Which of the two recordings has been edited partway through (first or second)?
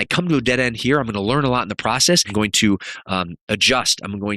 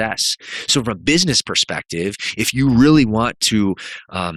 first